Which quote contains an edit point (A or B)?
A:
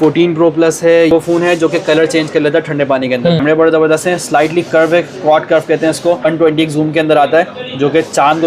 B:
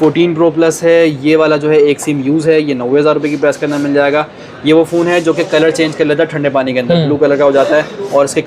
A